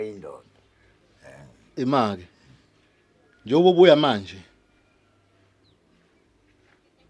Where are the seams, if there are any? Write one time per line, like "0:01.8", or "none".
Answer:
none